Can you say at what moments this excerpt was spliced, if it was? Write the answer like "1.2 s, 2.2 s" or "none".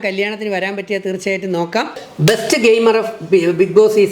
2.0 s